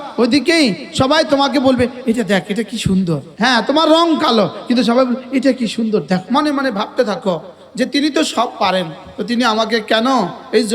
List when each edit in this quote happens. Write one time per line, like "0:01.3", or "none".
0:03.3
0:06.2